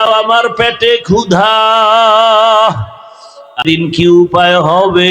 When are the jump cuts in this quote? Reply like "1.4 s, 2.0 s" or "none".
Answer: 3.6 s